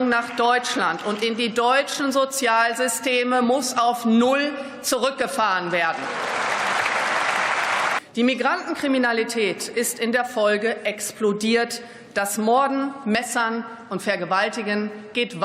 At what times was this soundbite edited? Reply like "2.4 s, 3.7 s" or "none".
8.0 s